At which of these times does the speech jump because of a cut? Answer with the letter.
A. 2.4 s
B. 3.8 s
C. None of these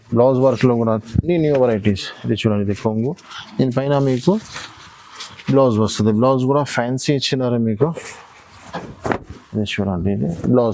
C